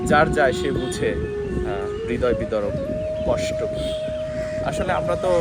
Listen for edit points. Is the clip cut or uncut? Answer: uncut